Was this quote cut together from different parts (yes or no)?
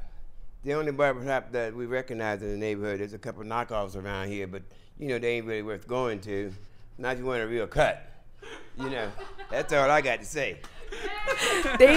no